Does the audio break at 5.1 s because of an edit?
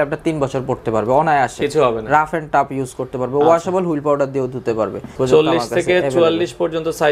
yes; 1 cut; at 5.1 s

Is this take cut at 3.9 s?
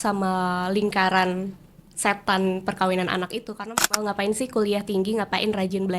yes; 1 cut; at 3.9 s

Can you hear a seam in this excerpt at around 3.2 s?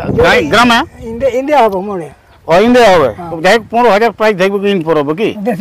yes; 1 cut; at 3.2 s

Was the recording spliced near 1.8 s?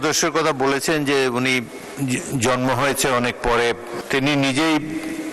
yes; 2 cuts; at 1.8 s, 3.9 s

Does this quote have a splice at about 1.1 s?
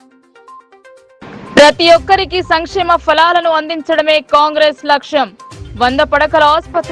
yes; 1 cut; at 1.1 s

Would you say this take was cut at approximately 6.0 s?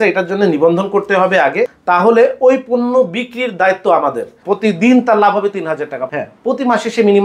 yes; 3 cuts; at 1.7 s, 4.4 s, 6.0 s

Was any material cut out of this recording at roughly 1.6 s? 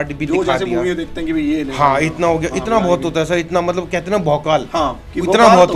no; 0 cuts

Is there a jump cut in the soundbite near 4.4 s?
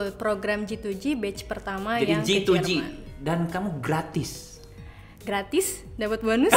no; 0 cuts

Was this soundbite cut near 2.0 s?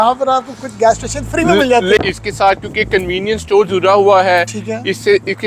yes; 1 cut; at 2.0 s

